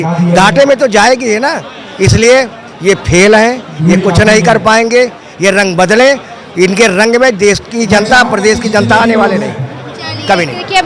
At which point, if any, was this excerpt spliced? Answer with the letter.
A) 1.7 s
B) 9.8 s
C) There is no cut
C